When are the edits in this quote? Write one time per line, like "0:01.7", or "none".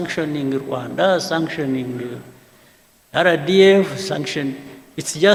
none

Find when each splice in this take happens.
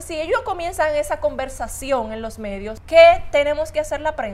0:02.8

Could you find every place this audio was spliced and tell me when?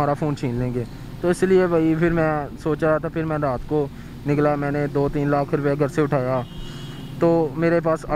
none

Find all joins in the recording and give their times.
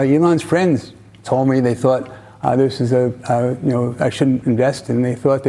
none

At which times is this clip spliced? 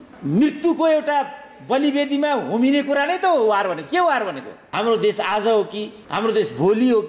0:04.6

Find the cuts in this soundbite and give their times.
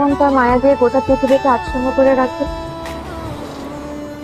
none

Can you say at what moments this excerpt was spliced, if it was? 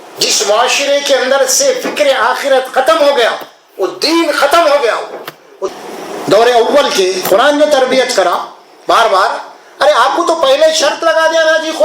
0:05.6

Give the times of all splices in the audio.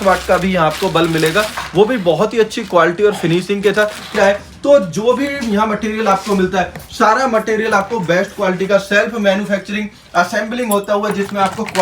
0:04.1

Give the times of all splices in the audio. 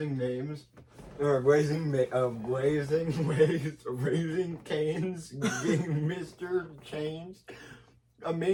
none

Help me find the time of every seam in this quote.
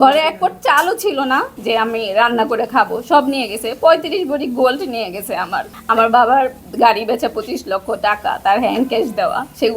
0:01.5
0:05.7

